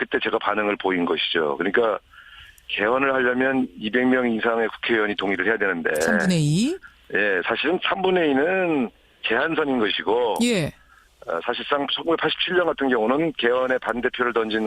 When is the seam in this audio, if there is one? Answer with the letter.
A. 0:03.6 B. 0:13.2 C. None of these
A